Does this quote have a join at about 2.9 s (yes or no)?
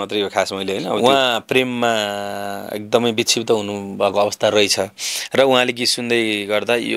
no